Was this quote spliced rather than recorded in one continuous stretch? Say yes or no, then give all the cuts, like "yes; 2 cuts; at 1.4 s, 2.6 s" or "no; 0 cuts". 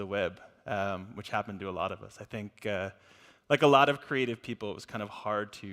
yes; 1 cut; at 2.1 s